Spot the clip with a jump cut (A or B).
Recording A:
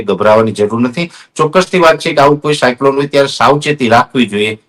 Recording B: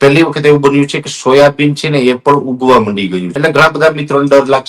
B